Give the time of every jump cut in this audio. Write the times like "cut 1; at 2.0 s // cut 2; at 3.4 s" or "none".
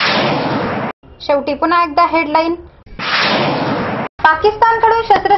none